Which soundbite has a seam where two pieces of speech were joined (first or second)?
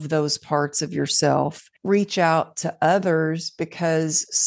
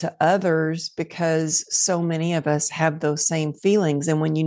first